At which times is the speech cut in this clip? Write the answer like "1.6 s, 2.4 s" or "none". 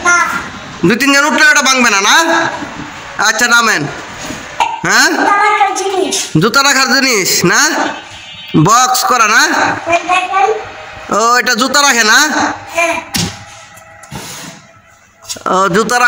4.6 s